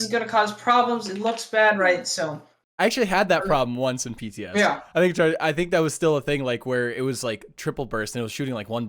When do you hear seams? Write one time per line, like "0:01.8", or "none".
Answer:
none